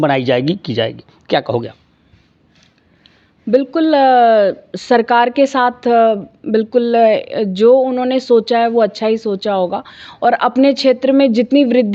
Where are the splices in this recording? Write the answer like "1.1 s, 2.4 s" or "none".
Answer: none